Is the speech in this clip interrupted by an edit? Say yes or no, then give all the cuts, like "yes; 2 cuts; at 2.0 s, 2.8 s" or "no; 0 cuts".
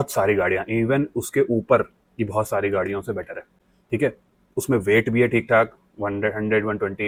no; 0 cuts